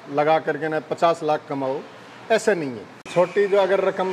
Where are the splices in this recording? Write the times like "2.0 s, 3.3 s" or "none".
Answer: 2.9 s